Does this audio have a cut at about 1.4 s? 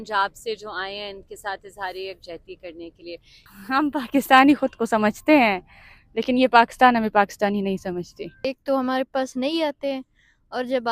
no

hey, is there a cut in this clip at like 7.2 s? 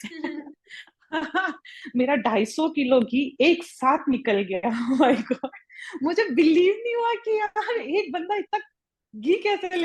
no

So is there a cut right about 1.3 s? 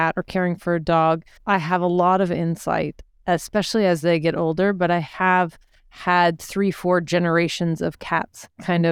yes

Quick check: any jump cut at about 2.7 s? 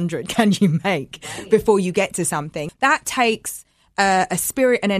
yes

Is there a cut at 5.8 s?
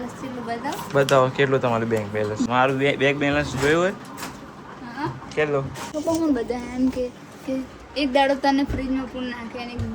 yes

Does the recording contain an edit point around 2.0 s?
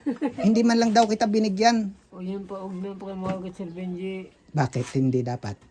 yes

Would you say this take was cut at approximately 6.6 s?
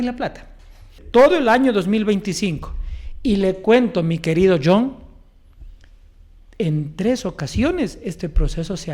no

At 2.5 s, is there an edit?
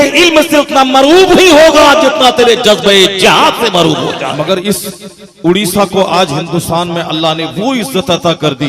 no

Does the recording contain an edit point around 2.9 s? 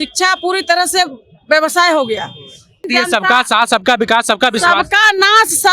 yes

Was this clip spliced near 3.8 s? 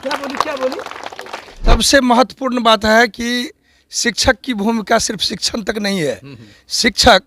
no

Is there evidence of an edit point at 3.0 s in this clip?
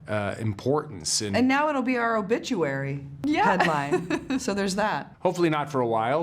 yes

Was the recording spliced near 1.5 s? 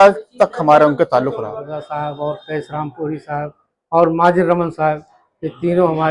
yes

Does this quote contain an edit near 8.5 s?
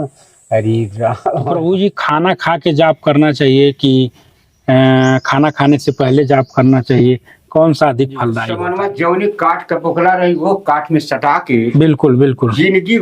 yes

